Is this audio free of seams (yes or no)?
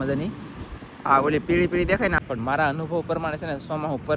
no